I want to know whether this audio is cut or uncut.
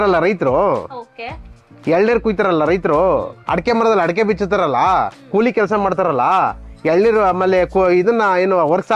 uncut